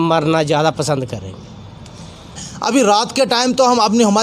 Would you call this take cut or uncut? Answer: cut